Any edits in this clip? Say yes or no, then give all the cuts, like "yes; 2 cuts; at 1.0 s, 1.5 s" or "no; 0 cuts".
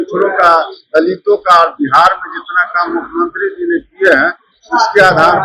no; 0 cuts